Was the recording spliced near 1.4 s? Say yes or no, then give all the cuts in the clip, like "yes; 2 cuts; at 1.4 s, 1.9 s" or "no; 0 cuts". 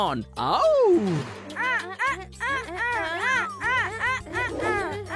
yes; 1 cut; at 1.4 s